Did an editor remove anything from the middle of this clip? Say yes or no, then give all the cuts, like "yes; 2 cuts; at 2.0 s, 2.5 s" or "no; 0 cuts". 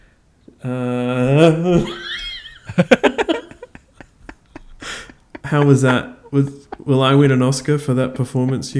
no; 0 cuts